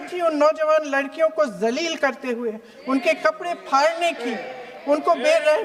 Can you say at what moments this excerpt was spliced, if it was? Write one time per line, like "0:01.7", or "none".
none